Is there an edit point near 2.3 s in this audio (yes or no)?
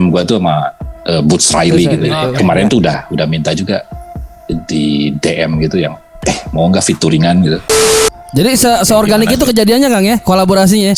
yes